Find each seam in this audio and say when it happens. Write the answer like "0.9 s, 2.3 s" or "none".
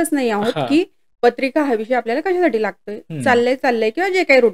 none